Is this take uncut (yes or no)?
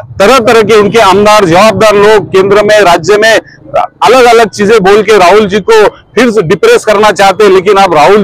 yes